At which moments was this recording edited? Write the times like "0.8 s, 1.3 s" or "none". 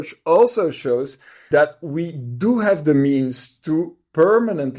1.4 s